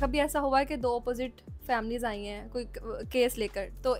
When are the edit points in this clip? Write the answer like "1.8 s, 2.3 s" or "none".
none